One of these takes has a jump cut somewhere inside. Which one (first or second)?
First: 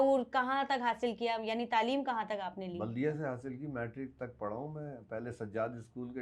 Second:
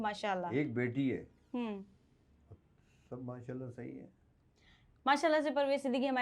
second